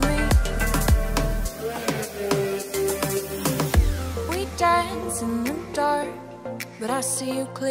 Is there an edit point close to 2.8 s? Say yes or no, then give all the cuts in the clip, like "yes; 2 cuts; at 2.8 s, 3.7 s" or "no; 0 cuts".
yes; 1 cut; at 2.8 s